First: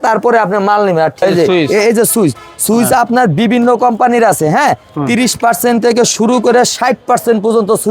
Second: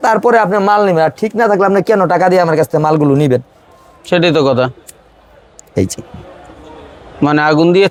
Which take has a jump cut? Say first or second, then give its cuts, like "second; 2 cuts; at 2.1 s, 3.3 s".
first; 1 cut; at 1.2 s